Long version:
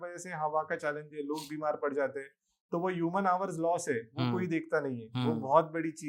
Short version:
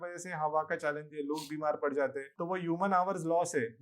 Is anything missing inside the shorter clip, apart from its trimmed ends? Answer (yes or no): yes